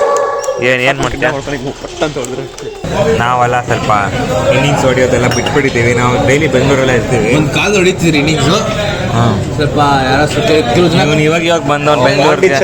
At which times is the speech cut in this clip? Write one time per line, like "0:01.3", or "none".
0:02.6